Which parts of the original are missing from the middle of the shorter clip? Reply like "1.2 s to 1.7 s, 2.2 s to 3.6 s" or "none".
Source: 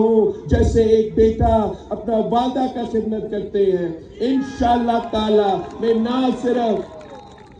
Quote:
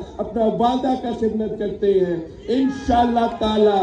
none